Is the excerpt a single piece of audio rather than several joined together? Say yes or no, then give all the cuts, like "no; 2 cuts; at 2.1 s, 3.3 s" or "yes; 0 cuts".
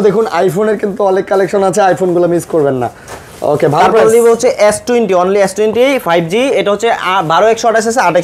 yes; 0 cuts